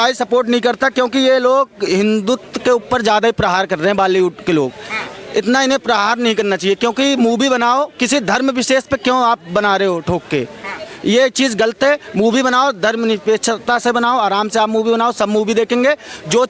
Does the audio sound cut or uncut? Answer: uncut